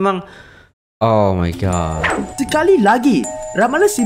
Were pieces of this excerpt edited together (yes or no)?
yes